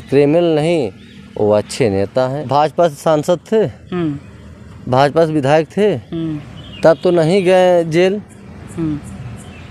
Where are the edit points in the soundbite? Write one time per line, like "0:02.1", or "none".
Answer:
0:02.4